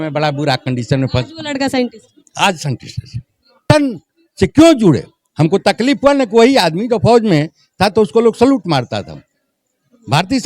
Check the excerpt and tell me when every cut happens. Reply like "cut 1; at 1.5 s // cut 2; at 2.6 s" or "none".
cut 1; at 3.6 s